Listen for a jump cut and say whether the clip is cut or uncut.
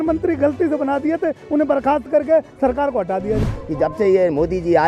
cut